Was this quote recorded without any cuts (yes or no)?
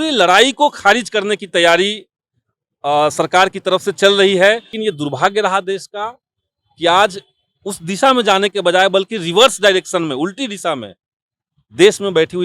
no